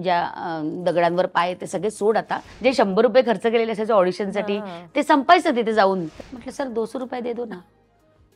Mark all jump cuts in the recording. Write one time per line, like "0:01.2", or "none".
0:02.5
0:06.1